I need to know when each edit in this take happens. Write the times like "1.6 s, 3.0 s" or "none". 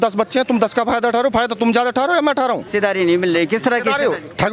2.6 s